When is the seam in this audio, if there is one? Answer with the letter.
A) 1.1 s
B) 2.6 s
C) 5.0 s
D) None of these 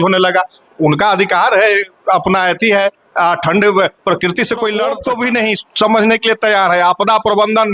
C